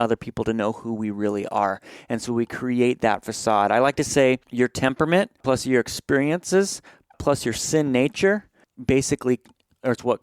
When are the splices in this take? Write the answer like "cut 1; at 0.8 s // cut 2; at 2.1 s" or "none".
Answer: cut 1; at 4.5 s // cut 2; at 5.4 s // cut 3; at 7.2 s // cut 4; at 8.7 s